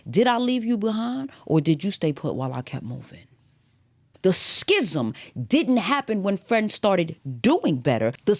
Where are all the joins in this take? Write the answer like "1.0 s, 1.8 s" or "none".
4.0 s